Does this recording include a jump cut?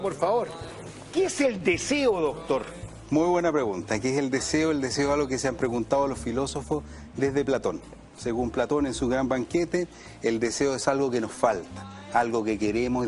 yes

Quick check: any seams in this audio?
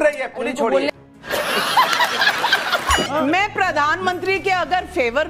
yes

